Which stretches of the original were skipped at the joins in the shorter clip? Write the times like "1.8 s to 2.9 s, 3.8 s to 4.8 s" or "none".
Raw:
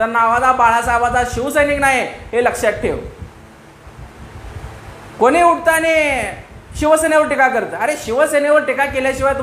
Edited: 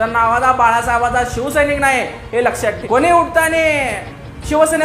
2.8 s to 5.1 s

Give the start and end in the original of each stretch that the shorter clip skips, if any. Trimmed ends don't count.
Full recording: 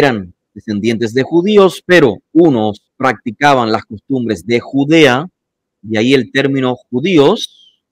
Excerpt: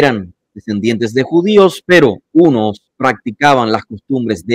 none

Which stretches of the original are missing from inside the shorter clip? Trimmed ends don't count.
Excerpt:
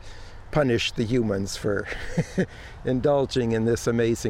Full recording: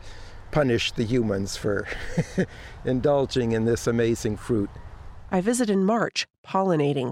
none

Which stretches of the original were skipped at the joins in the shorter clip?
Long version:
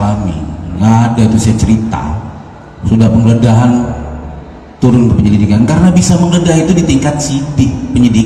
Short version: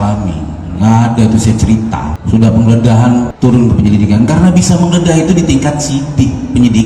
2.1 s to 2.7 s, 3.9 s to 4.7 s

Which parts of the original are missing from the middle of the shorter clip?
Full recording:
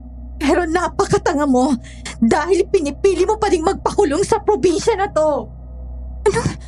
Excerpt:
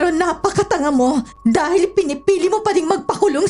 1.9 s to 2.1 s

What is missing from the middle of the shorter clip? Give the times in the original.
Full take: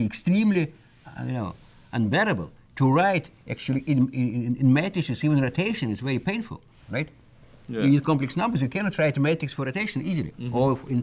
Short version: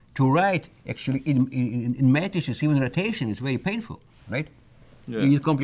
none

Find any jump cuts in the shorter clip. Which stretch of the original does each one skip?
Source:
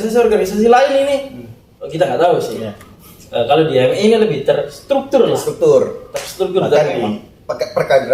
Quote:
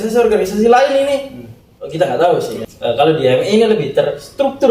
2.6 s to 3.1 s

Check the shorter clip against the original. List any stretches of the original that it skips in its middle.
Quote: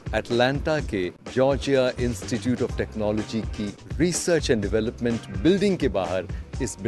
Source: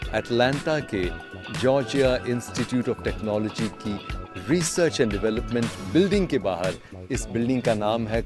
1.2 s to 1.5 s, 4.1 s to 4.3 s

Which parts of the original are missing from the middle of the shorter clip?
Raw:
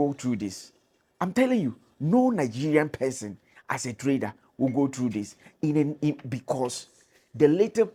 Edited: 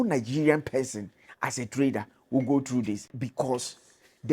5.4 s to 6.3 s

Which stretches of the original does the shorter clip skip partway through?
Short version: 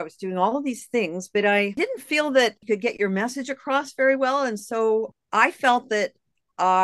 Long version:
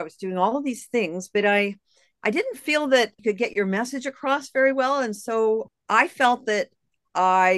1.8 s to 2.3 s

